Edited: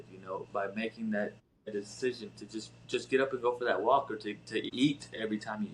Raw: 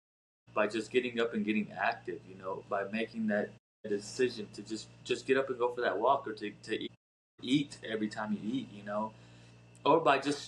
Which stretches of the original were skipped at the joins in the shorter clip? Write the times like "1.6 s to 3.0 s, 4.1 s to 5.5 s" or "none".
6.9 s to 7.4 s